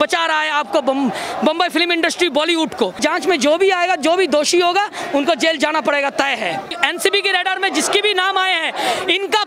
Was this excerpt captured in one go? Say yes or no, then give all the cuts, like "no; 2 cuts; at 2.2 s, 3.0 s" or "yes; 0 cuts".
no; 2 cuts; at 3.0 s, 6.7 s